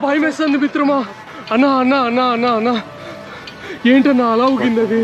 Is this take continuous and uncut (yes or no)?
yes